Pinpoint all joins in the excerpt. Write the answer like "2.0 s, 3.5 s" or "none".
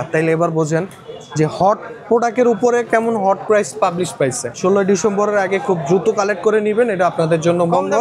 4.6 s